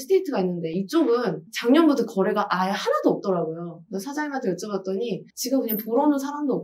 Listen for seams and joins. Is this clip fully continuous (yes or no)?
no